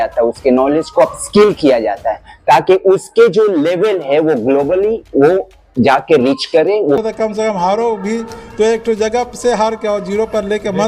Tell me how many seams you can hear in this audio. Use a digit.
1